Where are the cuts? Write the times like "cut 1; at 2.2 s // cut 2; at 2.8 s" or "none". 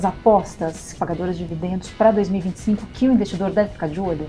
cut 1; at 0.9 s